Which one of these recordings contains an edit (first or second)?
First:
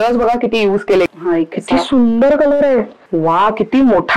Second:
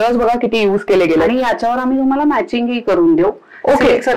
first